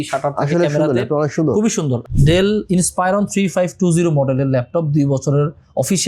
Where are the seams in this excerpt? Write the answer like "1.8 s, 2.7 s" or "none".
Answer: 2.0 s